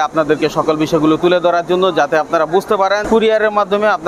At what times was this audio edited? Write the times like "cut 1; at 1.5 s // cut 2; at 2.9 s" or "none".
cut 1; at 3.0 s

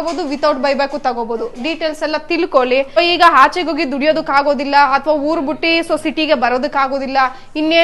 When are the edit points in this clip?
cut 1; at 3.0 s

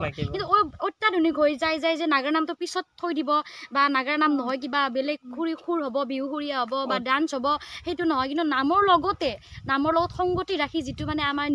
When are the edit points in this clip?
none

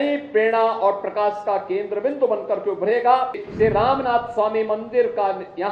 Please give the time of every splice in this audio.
cut 1; at 3.5 s

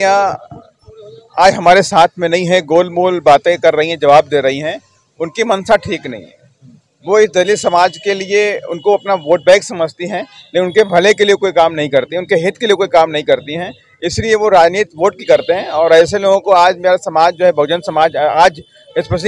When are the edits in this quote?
none

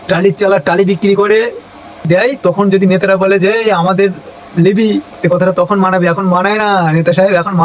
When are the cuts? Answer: cut 1; at 2.1 s // cut 2; at 5.1 s

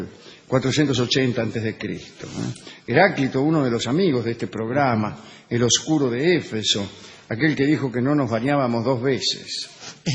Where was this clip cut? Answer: none

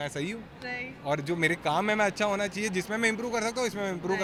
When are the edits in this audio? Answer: none

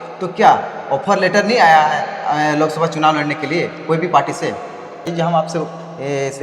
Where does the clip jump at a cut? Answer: cut 1; at 5.1 s

